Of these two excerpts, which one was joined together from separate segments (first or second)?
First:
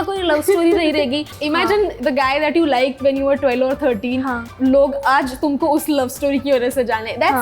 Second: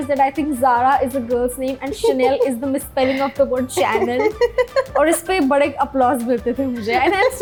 first